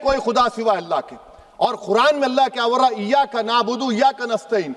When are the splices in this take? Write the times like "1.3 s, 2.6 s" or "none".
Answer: none